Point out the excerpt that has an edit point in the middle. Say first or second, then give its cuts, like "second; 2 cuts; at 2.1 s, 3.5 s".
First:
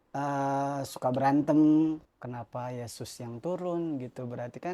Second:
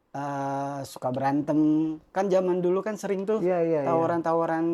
first; 1 cut; at 2.0 s